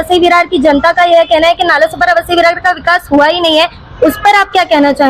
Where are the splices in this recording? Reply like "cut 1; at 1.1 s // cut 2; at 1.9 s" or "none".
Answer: none